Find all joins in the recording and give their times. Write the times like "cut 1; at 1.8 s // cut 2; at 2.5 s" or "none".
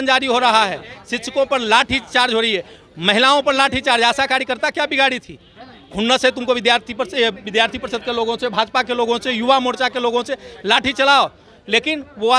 none